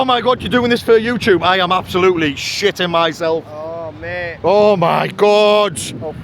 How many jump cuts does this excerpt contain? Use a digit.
1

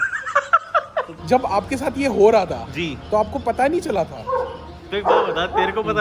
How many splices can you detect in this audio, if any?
1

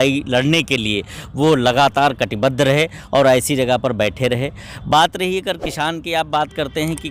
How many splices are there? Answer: 0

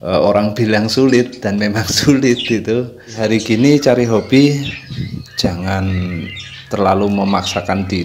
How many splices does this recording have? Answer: 1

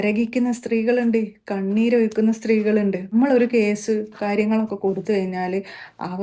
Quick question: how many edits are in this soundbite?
1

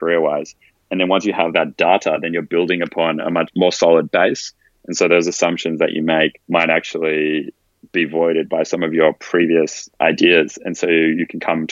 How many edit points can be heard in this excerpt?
3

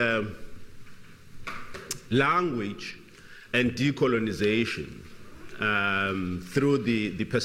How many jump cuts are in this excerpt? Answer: 1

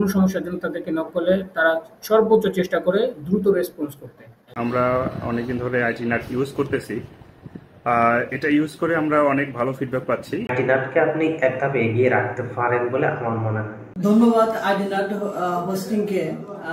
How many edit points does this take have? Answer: 3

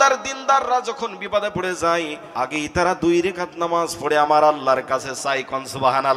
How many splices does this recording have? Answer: 1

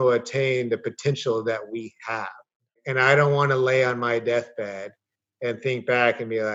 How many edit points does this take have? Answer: 1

